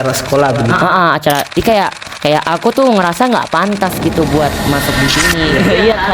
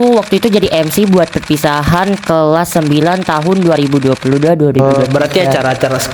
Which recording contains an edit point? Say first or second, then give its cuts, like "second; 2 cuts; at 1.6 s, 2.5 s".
first; 1 cut; at 1.6 s